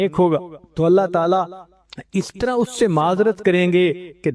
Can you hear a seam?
no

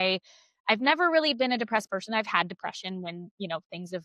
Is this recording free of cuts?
yes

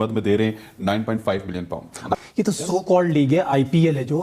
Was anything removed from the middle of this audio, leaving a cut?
yes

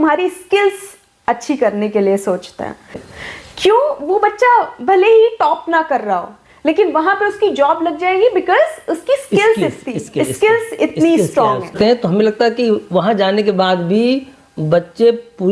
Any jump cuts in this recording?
yes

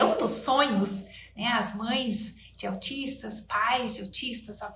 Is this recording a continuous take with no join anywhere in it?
yes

